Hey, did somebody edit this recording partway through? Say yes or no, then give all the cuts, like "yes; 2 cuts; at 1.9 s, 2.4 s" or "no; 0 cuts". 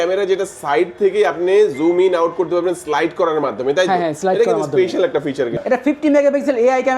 yes; 1 cut; at 5.6 s